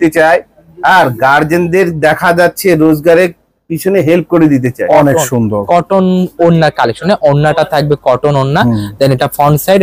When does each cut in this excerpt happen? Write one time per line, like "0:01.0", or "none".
0:04.8